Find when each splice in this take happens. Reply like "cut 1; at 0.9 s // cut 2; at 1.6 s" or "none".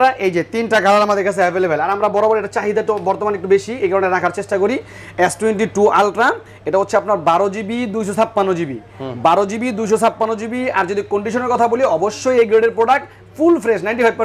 none

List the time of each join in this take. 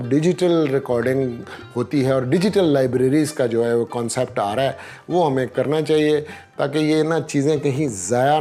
none

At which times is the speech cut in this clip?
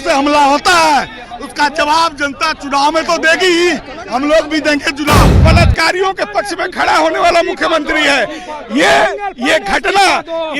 cut 1; at 5.4 s

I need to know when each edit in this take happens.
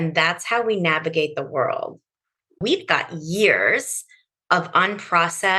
cut 1; at 2.6 s

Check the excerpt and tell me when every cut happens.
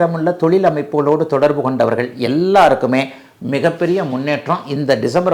none

